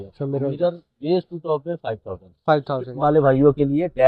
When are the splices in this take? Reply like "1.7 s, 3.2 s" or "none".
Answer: 2.9 s